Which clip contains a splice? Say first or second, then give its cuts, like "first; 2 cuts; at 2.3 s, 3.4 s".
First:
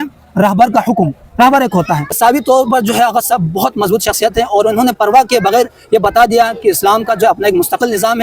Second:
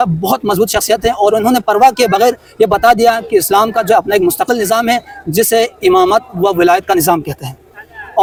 first; 1 cut; at 2.1 s